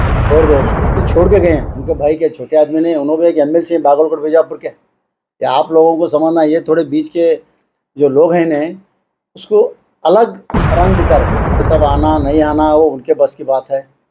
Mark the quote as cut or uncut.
cut